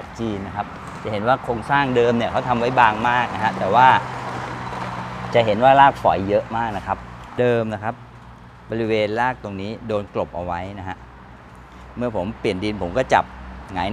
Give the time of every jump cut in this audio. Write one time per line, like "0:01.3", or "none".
0:07.4